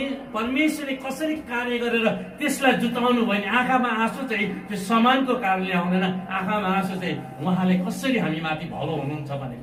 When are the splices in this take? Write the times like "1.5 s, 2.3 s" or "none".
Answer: none